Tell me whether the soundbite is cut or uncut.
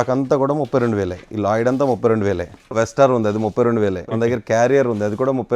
cut